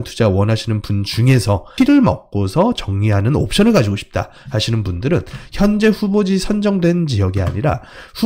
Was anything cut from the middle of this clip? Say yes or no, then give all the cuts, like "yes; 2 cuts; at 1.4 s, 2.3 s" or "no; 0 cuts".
yes; 1 cut; at 1.7 s